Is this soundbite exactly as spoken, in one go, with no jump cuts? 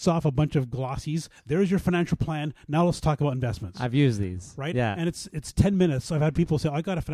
yes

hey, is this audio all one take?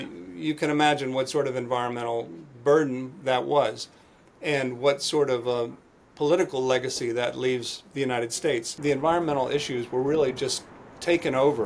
no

